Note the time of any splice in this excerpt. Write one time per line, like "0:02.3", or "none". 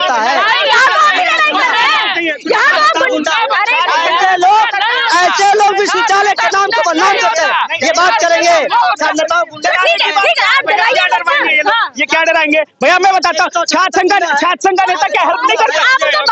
none